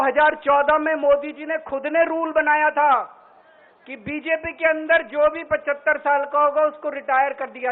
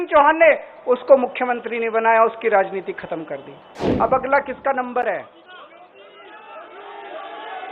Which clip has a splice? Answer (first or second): second